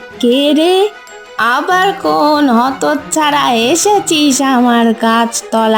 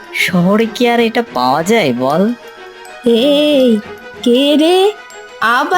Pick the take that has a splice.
second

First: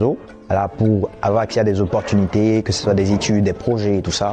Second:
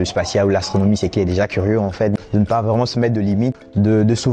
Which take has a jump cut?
second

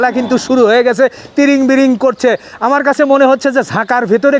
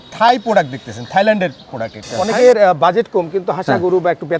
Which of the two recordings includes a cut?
second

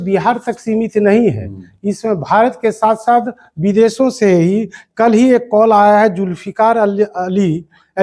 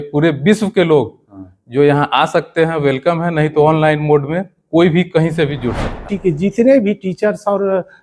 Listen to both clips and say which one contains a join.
second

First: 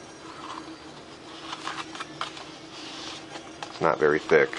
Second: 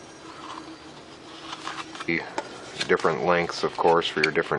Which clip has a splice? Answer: first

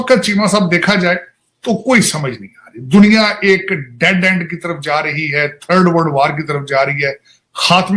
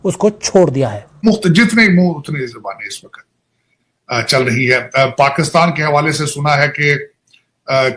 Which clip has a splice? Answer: second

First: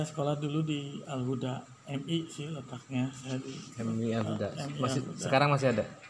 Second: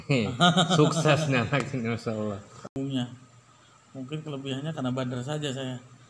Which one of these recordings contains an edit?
second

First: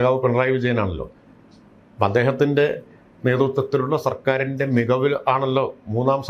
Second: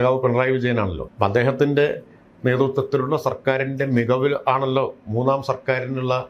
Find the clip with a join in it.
second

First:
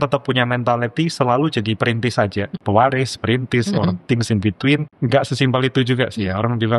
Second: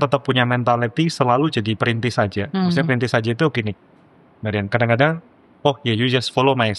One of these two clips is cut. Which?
first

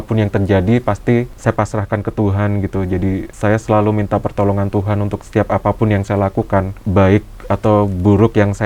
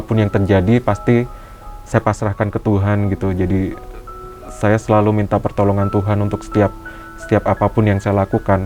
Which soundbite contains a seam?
first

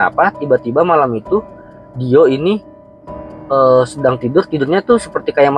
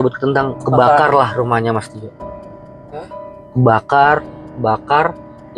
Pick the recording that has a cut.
second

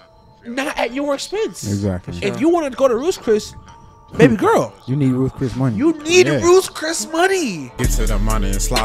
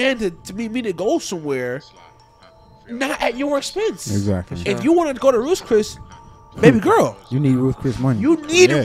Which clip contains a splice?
first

